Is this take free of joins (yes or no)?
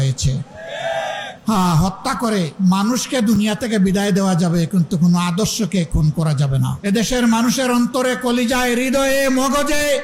no